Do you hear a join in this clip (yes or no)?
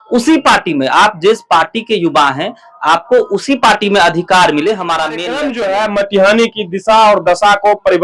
yes